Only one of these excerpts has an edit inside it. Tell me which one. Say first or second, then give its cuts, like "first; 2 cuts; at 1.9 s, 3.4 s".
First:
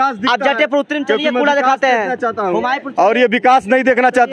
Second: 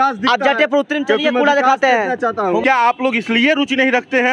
second; 1 cut; at 2.6 s